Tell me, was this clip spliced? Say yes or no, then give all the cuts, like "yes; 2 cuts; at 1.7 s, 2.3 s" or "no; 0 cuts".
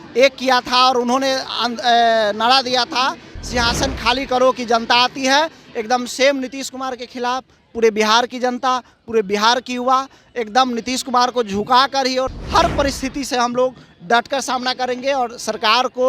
yes; 1 cut; at 12.4 s